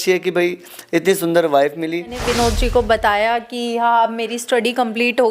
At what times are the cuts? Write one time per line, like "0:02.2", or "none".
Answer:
0:02.2